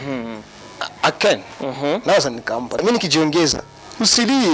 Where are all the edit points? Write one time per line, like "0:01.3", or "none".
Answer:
0:02.8